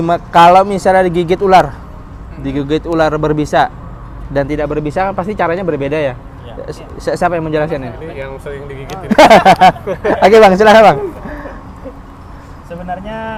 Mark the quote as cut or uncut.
uncut